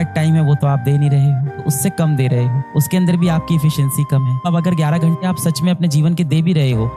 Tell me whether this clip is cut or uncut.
cut